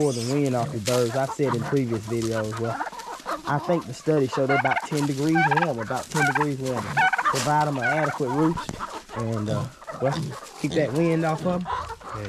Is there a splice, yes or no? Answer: no